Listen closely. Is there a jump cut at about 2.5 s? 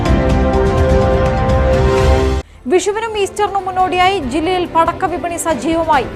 yes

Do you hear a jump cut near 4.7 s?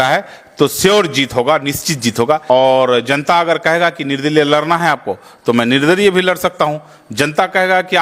no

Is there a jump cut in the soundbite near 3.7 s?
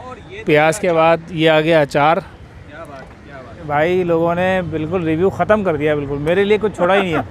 yes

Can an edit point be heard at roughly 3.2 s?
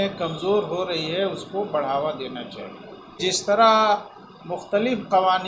yes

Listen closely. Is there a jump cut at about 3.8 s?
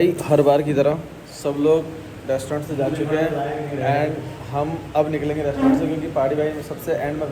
no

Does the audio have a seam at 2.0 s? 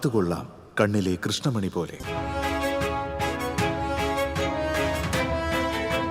yes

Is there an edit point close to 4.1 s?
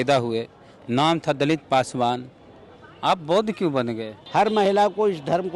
yes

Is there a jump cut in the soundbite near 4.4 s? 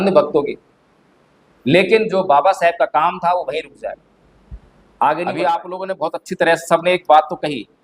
no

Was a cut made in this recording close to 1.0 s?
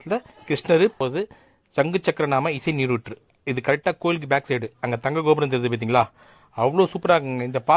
yes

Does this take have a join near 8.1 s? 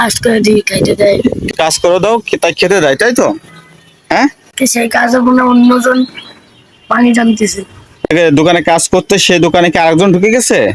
yes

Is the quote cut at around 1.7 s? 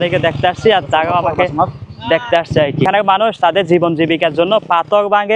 no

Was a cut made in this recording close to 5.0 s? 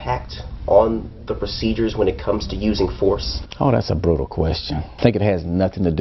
yes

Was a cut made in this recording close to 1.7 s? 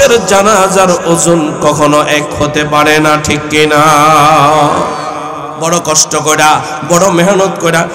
no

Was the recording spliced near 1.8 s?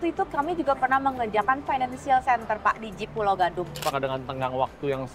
no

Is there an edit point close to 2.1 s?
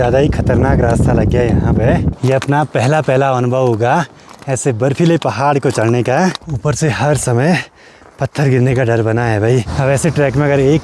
yes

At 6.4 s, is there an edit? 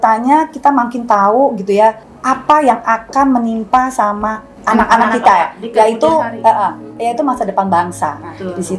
no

